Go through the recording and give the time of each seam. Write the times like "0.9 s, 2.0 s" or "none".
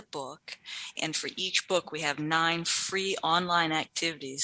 0.9 s